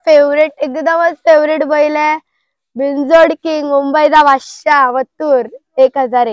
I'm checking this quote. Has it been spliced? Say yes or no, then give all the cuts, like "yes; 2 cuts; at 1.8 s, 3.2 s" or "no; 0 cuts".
no; 0 cuts